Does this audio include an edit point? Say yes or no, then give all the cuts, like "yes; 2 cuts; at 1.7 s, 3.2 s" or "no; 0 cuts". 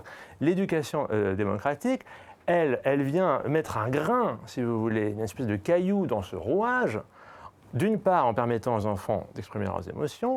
no; 0 cuts